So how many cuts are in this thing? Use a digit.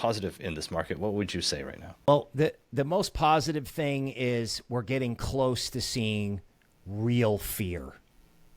1